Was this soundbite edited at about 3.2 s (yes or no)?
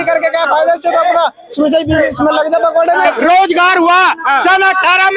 yes